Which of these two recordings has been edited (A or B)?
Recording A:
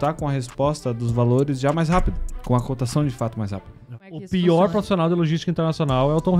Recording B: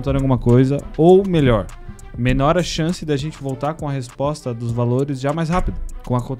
A